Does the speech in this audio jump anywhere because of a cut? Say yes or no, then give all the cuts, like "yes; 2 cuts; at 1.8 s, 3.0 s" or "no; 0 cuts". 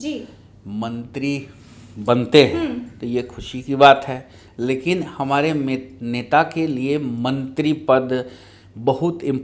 no; 0 cuts